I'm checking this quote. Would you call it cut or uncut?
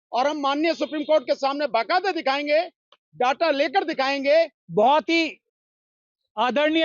cut